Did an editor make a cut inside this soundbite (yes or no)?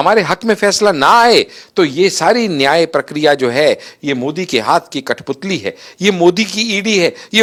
no